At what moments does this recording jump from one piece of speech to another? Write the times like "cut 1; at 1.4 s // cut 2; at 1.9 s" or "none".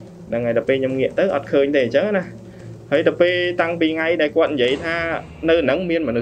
none